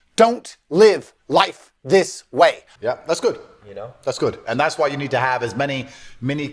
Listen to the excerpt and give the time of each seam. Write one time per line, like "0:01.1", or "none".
0:02.7